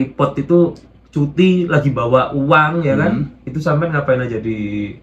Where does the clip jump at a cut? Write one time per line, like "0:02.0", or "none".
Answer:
none